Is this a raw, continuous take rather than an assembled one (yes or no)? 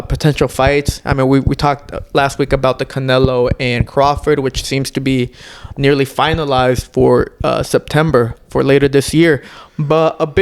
yes